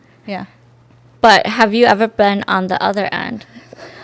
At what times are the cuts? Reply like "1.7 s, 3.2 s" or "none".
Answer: none